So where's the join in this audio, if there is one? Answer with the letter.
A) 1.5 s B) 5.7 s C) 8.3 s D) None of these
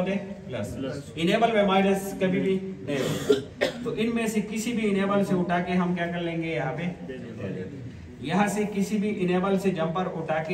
D